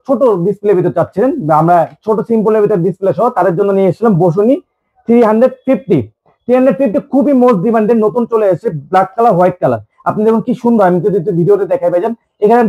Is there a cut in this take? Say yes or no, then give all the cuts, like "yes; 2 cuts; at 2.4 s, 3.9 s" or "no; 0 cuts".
no; 0 cuts